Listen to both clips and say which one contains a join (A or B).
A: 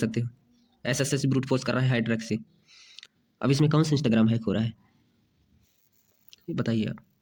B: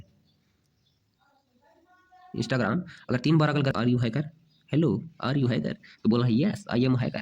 B